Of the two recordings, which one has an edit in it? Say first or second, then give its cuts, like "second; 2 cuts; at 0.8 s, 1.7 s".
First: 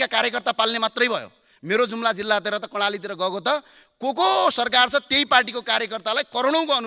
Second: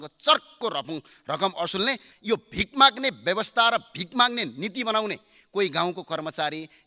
second; 1 cut; at 2.1 s